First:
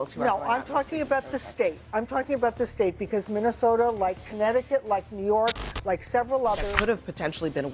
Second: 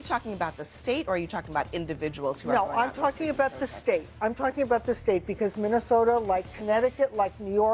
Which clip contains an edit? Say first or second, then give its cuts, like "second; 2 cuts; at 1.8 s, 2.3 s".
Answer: first; 1 cut; at 6.7 s